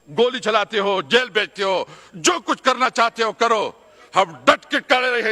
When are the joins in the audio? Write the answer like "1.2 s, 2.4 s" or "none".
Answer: none